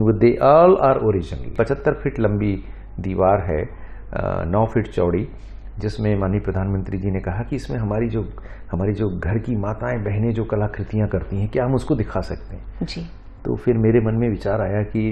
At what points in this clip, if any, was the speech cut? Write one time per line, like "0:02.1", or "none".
0:01.5